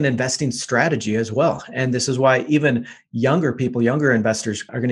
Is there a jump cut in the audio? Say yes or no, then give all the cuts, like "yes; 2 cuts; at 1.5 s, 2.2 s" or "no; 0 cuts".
no; 0 cuts